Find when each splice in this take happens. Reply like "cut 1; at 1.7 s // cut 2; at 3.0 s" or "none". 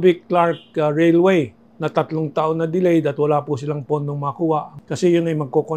cut 1; at 1.6 s // cut 2; at 4.7 s